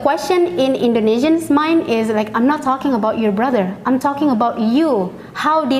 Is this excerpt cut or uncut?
uncut